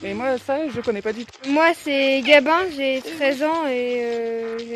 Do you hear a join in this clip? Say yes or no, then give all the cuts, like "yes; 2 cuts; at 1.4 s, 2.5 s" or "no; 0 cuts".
yes; 1 cut; at 1.3 s